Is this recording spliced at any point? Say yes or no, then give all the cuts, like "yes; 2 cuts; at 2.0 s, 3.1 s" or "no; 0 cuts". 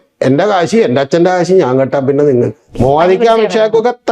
yes; 1 cut; at 2.7 s